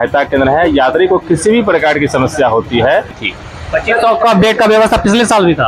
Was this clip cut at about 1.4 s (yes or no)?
no